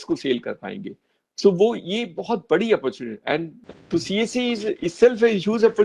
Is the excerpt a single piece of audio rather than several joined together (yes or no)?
no